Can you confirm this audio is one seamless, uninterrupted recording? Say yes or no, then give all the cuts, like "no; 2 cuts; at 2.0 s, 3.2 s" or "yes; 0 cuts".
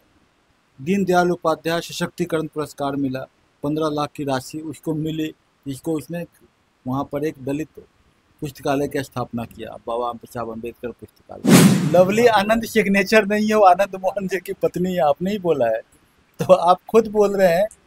no; 1 cut; at 11.7 s